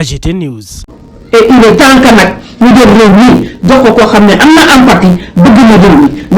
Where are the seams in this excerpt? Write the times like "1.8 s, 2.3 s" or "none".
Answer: 1.0 s